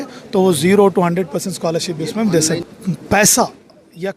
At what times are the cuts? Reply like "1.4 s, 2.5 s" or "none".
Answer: 2.7 s